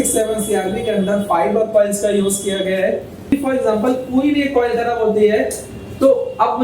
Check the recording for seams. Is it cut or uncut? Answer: cut